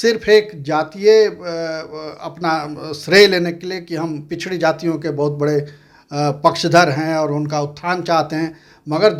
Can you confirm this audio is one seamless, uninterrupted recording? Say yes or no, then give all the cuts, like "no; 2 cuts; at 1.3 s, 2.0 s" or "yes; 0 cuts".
yes; 0 cuts